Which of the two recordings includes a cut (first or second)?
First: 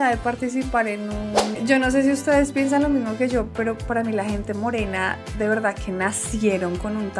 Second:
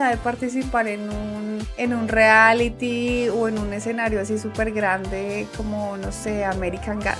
first